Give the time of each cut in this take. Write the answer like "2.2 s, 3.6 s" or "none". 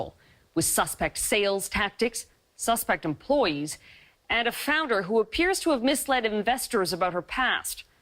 none